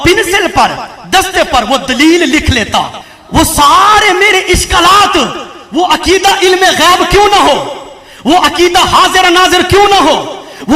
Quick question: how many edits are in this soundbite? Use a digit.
1